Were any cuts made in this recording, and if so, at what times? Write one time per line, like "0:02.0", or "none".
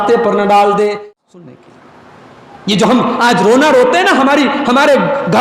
0:01.0